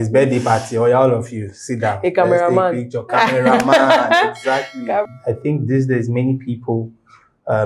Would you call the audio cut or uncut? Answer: cut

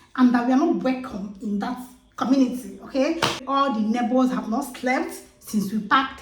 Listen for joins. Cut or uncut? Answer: cut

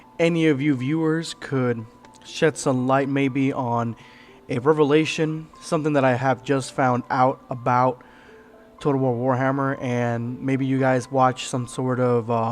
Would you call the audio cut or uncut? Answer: cut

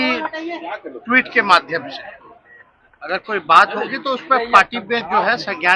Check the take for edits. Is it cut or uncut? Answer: uncut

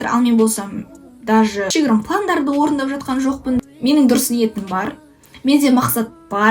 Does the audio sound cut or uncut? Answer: cut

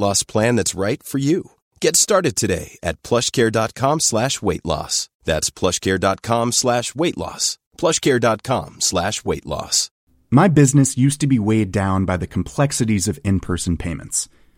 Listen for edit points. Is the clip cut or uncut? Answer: cut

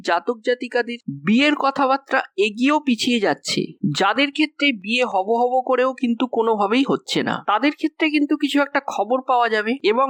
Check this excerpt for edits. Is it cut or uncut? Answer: uncut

